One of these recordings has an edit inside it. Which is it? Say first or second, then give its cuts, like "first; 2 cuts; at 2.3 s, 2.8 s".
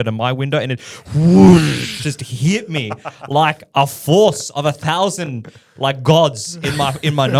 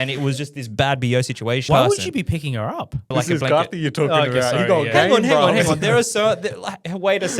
second; 2 cuts; at 1.6 s, 3.1 s